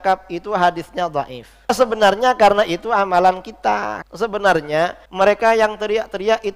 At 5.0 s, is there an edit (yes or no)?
yes